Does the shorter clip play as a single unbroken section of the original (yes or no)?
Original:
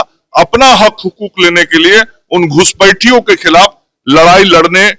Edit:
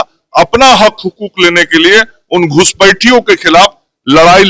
yes